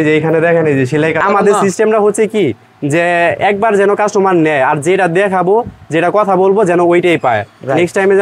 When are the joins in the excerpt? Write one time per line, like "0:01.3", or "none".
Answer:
0:01.2